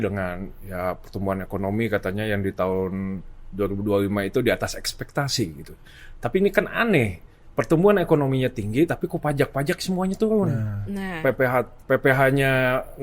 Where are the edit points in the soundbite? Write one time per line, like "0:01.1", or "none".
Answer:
none